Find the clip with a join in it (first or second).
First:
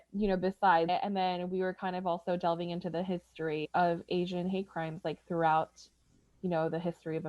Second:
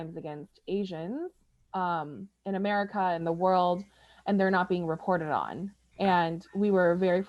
first